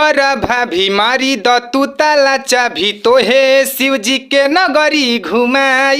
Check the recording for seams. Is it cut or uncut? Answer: uncut